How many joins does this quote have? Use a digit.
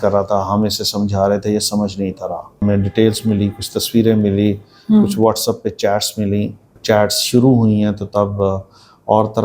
2